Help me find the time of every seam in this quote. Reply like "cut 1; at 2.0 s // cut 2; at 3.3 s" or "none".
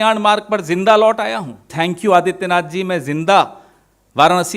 cut 1; at 1.6 s